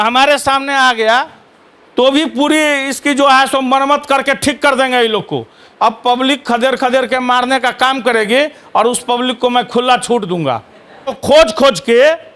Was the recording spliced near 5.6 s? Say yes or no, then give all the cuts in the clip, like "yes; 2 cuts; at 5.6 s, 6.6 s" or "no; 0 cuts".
yes; 2 cuts; at 5.6 s, 11.1 s